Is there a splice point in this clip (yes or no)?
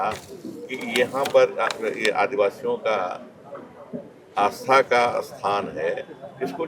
no